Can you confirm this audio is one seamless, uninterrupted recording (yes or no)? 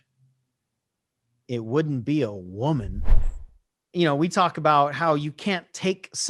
no